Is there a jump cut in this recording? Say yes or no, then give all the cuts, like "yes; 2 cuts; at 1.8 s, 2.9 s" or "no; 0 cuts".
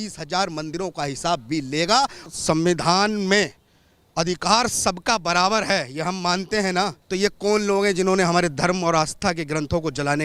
yes; 2 cuts; at 2.3 s, 7.0 s